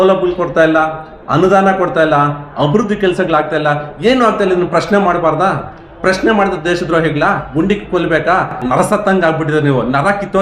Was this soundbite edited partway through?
yes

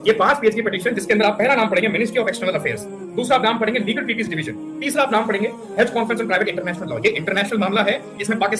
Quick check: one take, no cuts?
yes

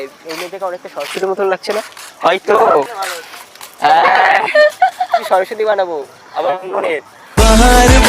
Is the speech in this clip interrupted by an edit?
yes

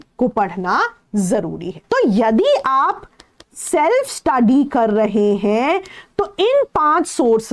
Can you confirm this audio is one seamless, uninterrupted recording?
no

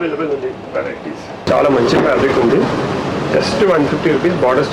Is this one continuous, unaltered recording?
no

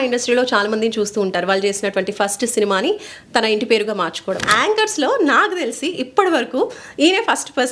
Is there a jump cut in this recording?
yes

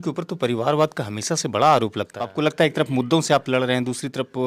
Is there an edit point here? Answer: yes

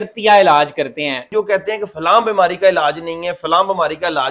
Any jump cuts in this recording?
yes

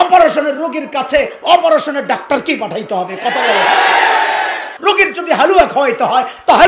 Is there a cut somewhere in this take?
yes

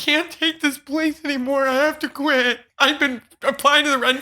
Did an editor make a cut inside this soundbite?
yes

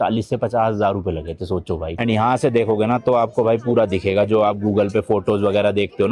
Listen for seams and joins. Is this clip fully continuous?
no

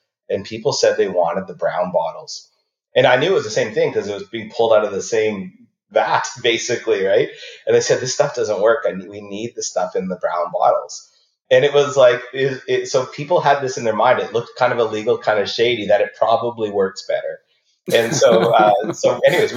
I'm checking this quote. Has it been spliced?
no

